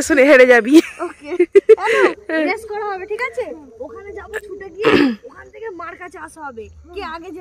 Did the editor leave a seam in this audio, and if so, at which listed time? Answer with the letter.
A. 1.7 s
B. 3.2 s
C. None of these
C